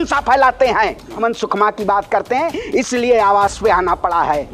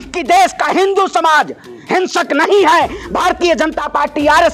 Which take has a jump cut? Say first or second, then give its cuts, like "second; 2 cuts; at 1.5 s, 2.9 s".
first; 1 cut; at 1.2 s